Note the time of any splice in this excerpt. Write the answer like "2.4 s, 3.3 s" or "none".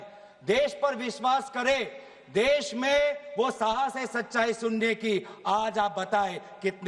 none